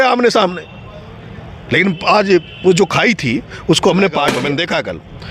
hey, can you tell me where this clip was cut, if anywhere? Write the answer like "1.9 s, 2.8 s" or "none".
4.4 s